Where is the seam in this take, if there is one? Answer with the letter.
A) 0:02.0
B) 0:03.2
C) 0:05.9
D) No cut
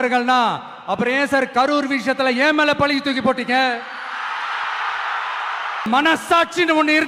C